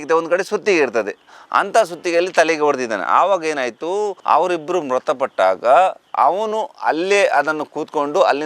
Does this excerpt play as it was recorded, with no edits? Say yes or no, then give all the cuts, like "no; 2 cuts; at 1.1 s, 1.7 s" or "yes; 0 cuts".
yes; 0 cuts